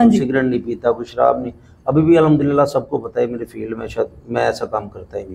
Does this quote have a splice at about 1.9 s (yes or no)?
no